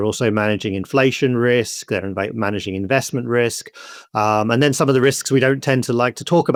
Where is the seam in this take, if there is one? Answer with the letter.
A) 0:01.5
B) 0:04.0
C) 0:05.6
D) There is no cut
D